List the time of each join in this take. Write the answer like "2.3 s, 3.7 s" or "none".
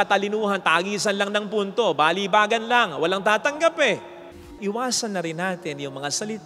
4.5 s